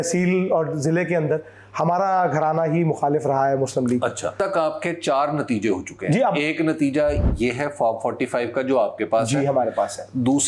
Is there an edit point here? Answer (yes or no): yes